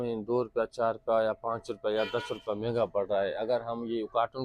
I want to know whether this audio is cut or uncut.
uncut